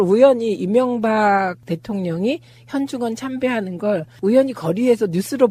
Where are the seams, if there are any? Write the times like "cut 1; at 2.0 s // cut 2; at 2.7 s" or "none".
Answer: none